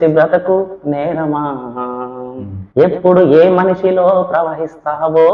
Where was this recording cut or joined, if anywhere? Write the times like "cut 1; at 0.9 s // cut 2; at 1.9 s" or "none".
none